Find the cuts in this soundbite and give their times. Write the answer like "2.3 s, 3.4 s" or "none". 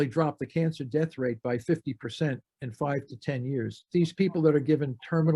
3.8 s